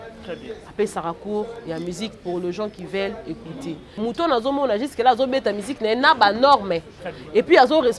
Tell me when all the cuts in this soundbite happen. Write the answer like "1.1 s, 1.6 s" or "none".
4.0 s